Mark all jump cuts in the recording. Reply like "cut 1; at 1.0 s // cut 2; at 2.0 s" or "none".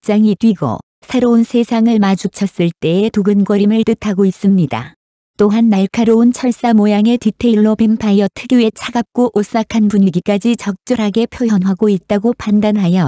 none